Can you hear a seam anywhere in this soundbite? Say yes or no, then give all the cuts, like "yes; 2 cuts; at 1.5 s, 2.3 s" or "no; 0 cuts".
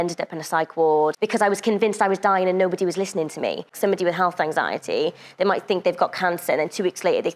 yes; 1 cut; at 3.7 s